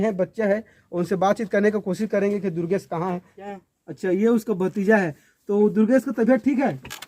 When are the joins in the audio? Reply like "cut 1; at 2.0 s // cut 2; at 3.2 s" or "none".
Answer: cut 1; at 3.3 s